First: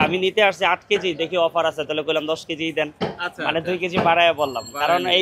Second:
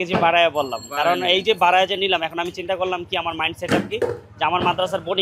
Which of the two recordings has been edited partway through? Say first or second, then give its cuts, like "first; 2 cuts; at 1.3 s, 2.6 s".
first; 1 cut; at 2.9 s